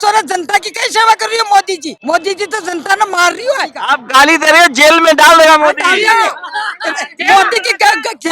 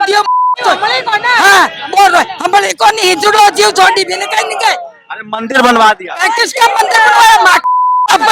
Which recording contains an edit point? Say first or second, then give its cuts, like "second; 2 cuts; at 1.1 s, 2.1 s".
first; 2 cuts; at 1.9 s, 3.7 s